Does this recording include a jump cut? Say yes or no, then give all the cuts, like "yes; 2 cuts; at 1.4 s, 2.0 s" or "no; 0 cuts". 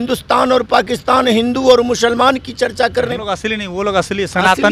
yes; 1 cut; at 3.2 s